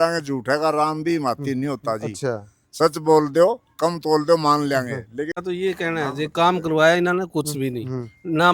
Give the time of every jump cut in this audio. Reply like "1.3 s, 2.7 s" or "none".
5.4 s